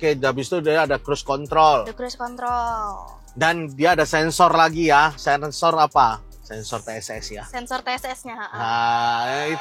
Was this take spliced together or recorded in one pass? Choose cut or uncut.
uncut